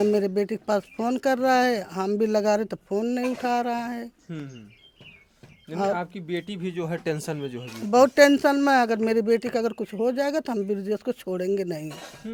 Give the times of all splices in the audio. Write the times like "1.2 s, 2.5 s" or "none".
none

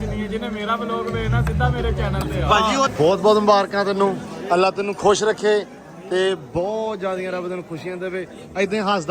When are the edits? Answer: 2.9 s

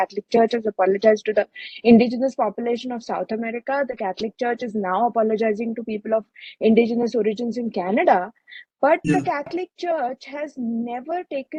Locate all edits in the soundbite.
none

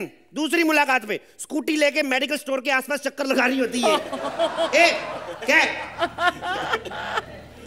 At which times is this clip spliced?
none

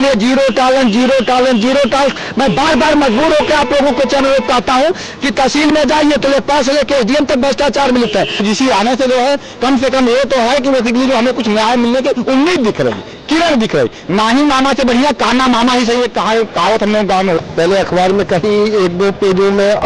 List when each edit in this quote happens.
8.4 s, 17.5 s

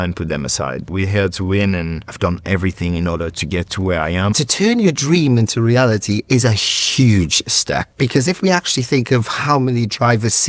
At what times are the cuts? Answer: 0.9 s, 2.2 s, 4.3 s, 8.0 s

